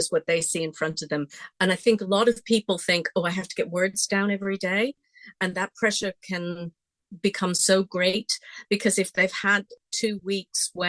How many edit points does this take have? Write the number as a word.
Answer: one